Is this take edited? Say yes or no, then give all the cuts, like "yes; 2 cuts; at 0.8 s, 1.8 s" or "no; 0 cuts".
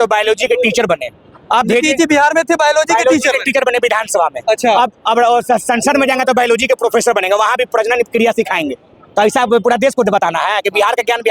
no; 0 cuts